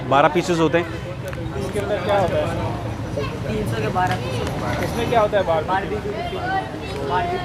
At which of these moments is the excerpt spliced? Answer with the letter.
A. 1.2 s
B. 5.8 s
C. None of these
C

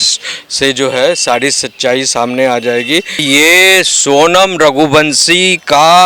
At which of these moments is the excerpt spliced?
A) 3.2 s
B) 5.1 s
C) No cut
A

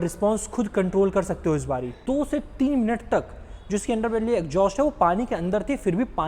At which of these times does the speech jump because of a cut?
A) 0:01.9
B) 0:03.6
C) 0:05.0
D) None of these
A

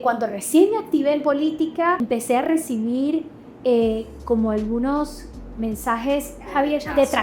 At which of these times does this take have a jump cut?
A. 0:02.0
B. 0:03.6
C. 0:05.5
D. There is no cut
A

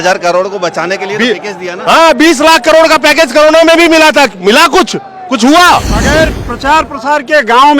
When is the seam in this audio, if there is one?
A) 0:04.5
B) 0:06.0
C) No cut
B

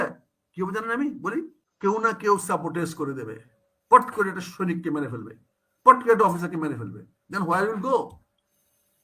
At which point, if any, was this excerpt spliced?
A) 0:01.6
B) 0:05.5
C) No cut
A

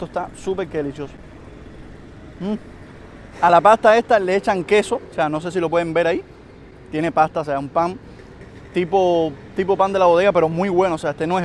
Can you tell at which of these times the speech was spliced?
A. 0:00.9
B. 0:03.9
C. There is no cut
C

